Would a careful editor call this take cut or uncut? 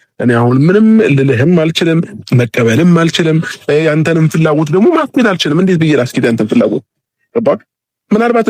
uncut